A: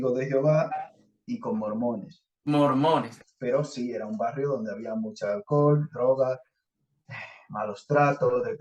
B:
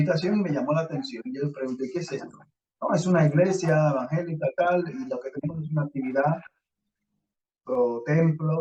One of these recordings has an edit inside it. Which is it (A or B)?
A